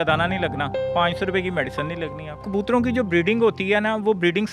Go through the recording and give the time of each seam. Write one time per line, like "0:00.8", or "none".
0:02.4